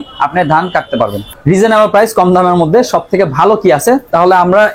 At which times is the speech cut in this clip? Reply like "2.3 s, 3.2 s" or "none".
1.2 s